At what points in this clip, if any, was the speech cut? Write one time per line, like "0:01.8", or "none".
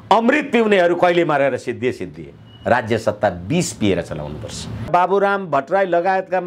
0:04.9